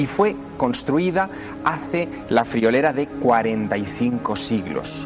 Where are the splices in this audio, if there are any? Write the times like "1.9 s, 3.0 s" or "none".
none